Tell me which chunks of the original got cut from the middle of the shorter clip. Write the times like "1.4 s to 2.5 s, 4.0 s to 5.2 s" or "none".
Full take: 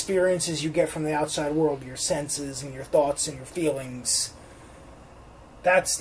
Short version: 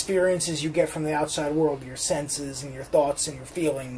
none